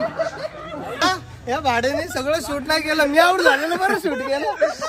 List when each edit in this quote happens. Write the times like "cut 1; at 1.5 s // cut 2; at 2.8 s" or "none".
cut 1; at 1.0 s